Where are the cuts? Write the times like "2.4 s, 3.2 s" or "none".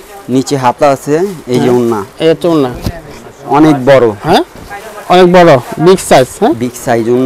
none

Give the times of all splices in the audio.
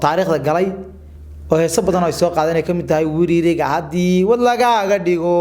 none

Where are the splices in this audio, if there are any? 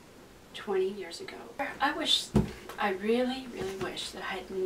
1.6 s

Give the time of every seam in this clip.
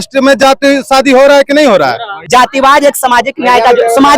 2.1 s

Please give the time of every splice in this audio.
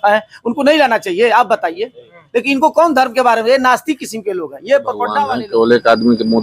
5.3 s

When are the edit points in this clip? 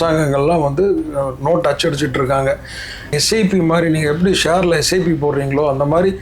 3.1 s

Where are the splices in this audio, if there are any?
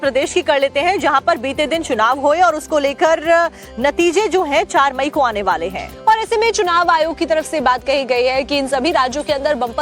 3.2 s

